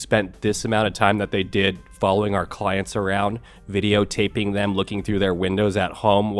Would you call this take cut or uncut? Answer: uncut